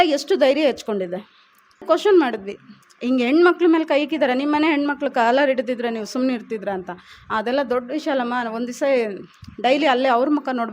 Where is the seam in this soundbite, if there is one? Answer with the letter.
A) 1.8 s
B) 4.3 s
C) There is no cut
A